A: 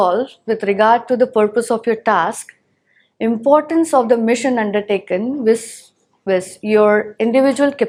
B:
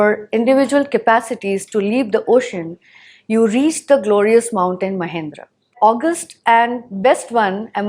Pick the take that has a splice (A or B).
B